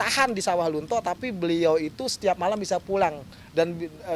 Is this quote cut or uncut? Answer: uncut